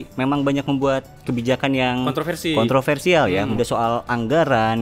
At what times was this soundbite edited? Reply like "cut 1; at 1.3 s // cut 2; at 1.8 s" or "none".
cut 1; at 3.5 s